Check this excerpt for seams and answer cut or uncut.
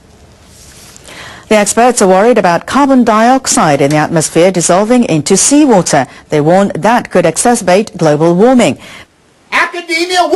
cut